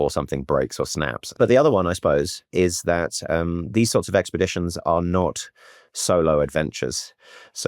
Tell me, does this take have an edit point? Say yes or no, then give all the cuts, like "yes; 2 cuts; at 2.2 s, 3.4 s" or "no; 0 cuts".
yes; 1 cut; at 1.3 s